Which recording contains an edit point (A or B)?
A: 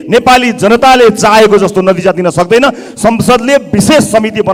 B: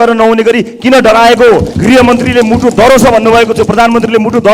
B